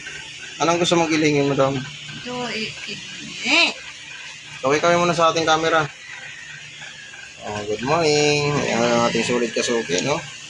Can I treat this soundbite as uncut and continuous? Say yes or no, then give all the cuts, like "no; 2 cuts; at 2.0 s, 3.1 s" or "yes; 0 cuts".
yes; 0 cuts